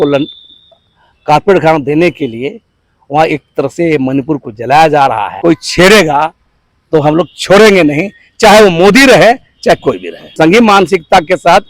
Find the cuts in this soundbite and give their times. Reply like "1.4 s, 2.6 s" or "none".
5.3 s, 10.3 s